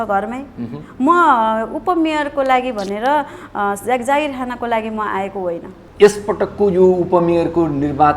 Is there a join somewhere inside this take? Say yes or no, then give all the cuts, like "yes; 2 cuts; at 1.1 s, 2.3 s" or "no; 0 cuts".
yes; 1 cut; at 5.8 s